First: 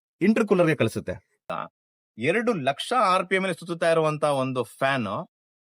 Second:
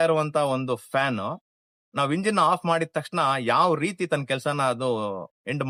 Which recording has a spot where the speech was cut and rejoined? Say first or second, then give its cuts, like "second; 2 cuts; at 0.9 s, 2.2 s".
first; 1 cut; at 1.5 s